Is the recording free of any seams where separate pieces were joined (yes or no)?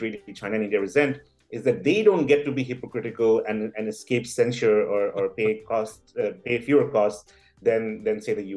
yes